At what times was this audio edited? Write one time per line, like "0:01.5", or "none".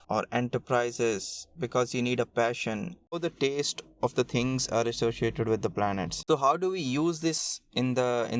0:03.1
0:06.1